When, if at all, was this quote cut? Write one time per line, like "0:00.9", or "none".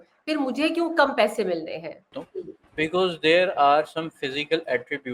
0:02.1